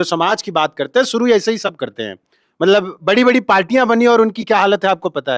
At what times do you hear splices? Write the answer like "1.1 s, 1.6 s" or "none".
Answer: none